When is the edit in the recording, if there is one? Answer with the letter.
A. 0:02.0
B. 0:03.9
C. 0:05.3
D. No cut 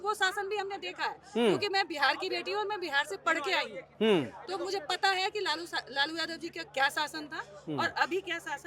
D